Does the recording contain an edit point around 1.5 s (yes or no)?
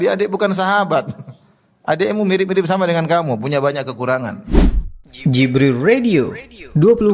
no